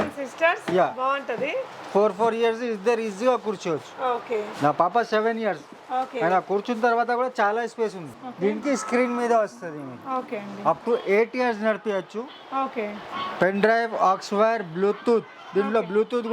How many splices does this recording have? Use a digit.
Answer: 1